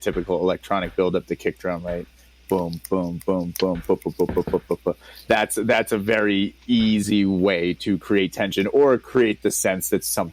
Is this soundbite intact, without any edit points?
yes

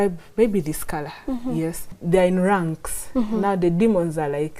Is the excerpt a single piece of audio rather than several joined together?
no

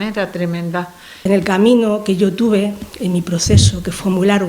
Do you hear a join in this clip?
yes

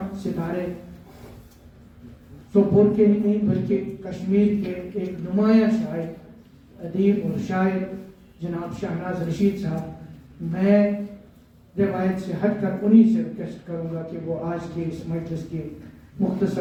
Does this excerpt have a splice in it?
no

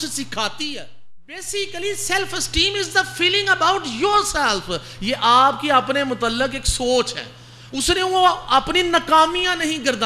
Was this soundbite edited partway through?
yes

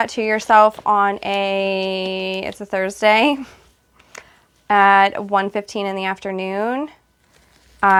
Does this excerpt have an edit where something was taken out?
no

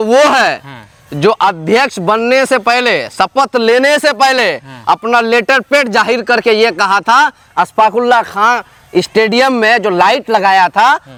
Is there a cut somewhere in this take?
no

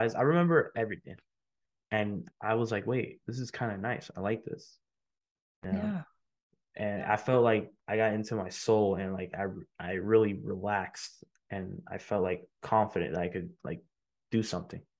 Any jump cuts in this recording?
yes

